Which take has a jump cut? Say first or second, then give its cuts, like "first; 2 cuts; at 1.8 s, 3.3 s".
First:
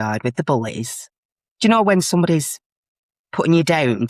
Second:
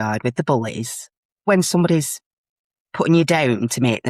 second; 1 cut; at 1.5 s